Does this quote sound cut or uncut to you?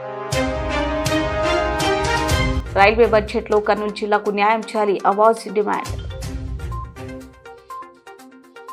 uncut